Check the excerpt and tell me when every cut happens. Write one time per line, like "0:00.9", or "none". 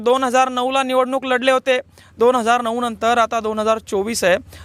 none